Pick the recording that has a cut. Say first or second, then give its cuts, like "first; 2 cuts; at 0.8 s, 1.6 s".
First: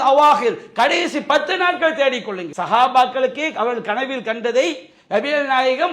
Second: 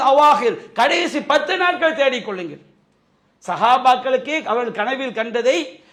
first; 1 cut; at 2.5 s